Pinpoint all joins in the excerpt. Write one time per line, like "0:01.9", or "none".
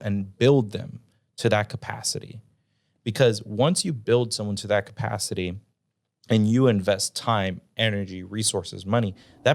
none